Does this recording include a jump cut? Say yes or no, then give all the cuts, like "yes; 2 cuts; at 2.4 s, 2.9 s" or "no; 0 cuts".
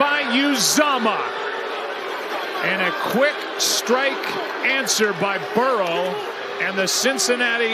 no; 0 cuts